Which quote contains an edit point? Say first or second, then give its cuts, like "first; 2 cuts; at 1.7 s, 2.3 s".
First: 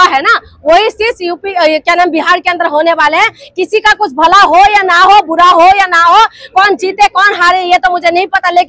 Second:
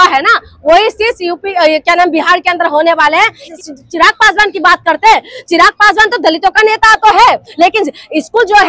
second; 1 cut; at 3.5 s